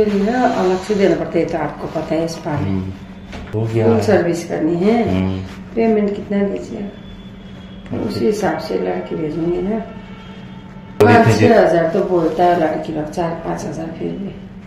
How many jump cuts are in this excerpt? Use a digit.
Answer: 2